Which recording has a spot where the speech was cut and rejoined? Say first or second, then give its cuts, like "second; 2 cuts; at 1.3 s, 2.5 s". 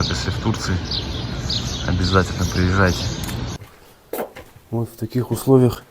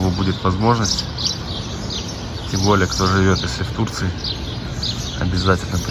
first; 1 cut; at 3.6 s